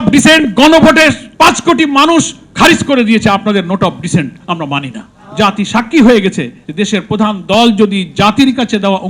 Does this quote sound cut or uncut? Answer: cut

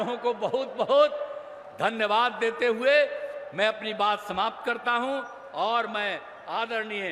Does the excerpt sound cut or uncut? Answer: uncut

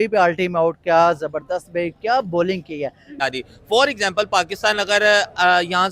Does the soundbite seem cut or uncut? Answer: cut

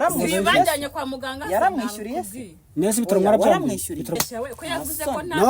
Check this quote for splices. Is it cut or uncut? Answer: cut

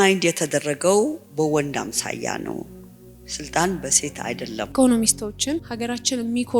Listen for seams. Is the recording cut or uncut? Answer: cut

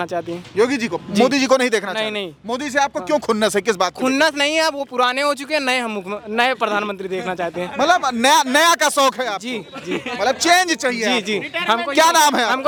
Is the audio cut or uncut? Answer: uncut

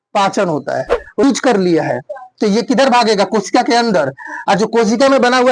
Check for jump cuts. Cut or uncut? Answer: cut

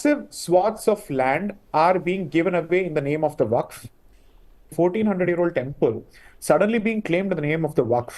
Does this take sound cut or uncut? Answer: cut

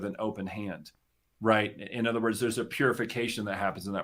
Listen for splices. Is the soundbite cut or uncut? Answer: uncut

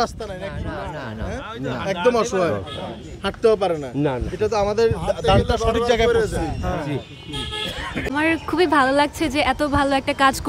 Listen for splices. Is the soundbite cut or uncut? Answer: cut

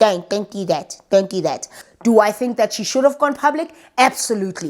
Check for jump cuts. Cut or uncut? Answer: cut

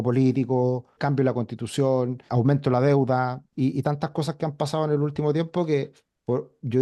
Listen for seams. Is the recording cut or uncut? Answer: cut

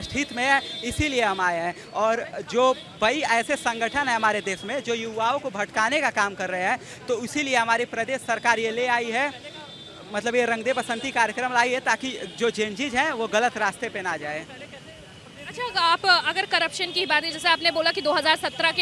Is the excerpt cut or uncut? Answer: uncut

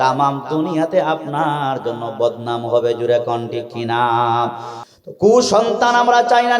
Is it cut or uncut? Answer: cut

